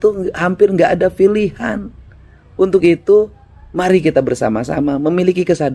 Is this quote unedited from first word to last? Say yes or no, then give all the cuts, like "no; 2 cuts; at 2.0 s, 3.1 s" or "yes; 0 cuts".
yes; 0 cuts